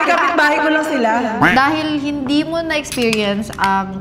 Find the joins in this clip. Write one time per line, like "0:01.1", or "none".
0:01.5